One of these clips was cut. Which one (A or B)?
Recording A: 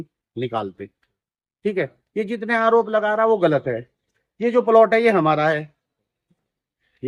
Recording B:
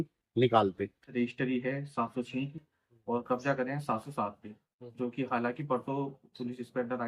B